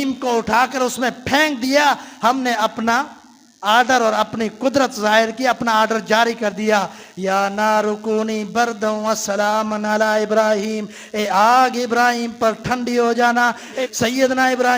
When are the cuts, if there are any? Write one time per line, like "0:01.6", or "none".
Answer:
0:13.7